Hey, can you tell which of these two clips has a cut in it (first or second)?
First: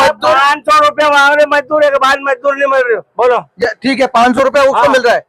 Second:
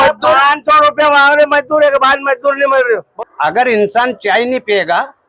second